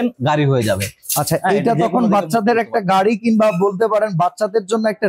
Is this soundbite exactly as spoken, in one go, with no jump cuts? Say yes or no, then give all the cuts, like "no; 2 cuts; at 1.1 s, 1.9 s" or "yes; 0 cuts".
yes; 0 cuts